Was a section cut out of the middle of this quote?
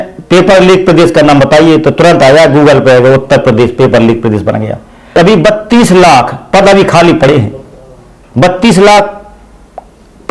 yes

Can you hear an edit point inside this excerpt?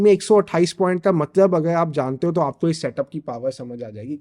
no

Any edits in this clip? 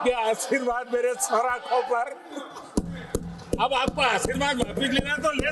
no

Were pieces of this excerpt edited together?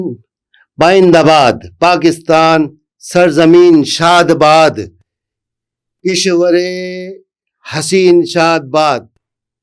no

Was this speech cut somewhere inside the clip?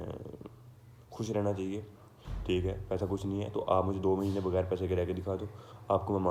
no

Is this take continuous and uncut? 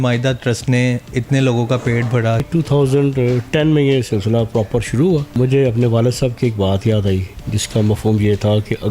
no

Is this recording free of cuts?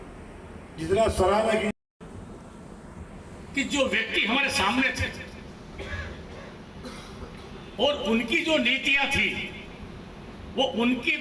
no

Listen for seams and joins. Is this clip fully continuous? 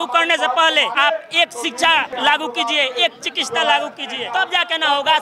no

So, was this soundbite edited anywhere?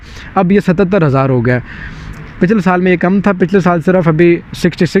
no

